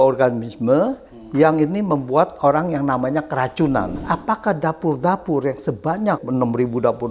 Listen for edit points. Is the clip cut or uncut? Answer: cut